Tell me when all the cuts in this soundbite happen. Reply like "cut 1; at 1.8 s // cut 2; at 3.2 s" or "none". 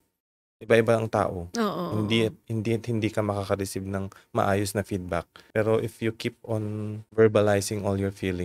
cut 1; at 5.4 s // cut 2; at 7.0 s